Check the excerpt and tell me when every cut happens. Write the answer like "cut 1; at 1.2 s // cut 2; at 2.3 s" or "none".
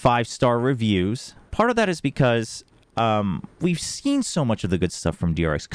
cut 1; at 1.5 s